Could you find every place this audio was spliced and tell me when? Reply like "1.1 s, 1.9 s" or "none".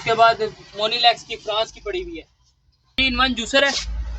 3.0 s